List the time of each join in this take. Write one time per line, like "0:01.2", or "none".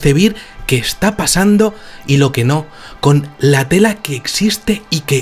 0:01.2